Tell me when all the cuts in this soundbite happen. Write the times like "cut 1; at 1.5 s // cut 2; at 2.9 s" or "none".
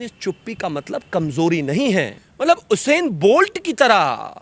cut 1; at 2.2 s

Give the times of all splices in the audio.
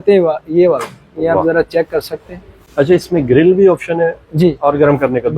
none

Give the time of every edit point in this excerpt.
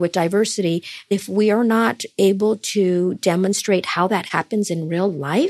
cut 1; at 1.1 s

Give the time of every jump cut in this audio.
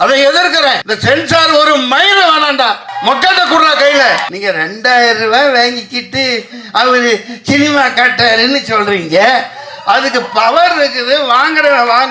cut 1; at 0.9 s // cut 2; at 2.9 s // cut 3; at 4.3 s

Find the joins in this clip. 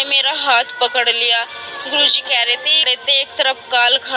cut 1; at 2.9 s

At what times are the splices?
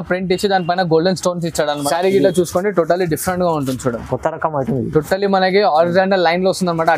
cut 1; at 1.8 s

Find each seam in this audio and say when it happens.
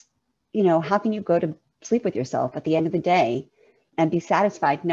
none

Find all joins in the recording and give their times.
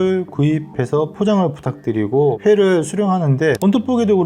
none

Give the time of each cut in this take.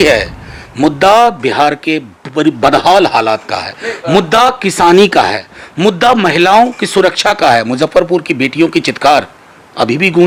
none

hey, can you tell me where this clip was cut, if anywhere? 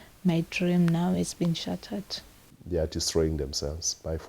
cut 1; at 2.5 s

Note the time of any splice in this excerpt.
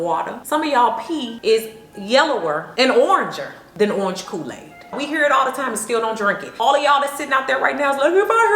cut 1; at 1.3 s // cut 2; at 4.9 s

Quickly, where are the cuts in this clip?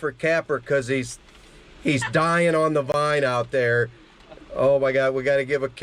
none

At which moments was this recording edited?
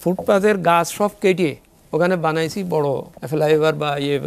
cut 1; at 3.1 s

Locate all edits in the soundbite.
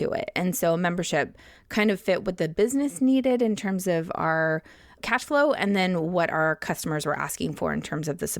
cut 1; at 5.0 s

